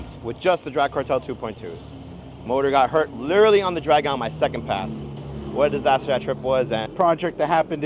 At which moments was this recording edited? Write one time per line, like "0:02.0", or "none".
0:06.9